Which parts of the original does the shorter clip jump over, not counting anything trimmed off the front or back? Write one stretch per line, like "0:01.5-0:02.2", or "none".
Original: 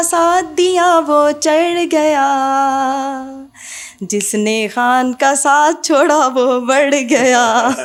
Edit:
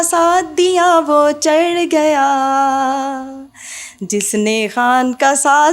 none